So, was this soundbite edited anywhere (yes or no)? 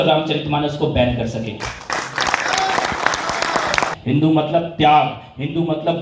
yes